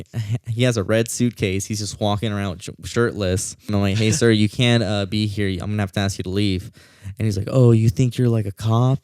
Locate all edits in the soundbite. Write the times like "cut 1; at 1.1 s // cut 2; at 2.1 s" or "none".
cut 1; at 3.7 s